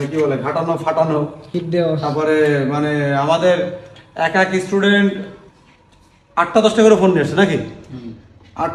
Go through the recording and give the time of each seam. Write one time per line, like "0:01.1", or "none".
none